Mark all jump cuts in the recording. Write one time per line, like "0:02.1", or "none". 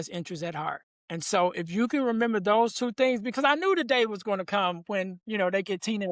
0:00.9